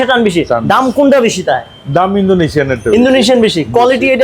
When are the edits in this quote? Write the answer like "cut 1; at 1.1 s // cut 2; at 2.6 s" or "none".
none

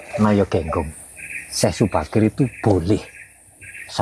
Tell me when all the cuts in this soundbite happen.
cut 1; at 1.0 s

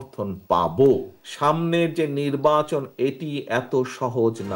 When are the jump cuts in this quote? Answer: cut 1; at 1.1 s

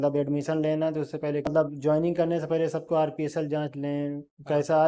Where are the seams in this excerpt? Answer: cut 1; at 1.5 s

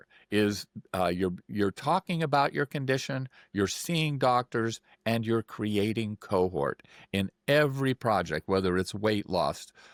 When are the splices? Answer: none

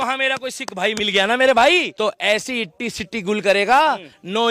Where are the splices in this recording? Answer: cut 1; at 1.9 s

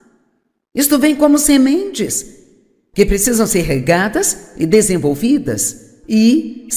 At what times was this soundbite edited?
cut 1; at 1.6 s

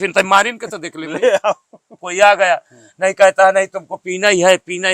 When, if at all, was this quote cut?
cut 1; at 2.1 s

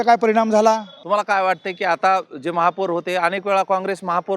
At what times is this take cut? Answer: cut 1; at 0.9 s

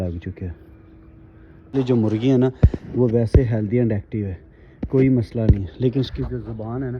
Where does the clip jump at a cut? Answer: cut 1; at 1.7 s

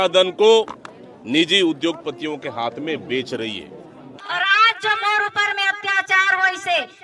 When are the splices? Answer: cut 1; at 4.2 s

